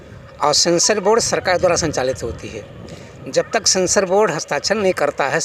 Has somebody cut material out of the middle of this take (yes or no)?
no